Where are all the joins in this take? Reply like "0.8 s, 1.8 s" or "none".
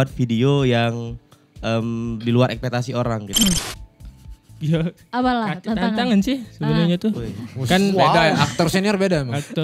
3.4 s